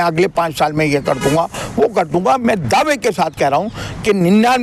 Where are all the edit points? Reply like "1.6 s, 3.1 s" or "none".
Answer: none